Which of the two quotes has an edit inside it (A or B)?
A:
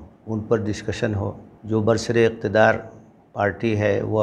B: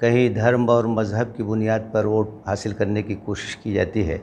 A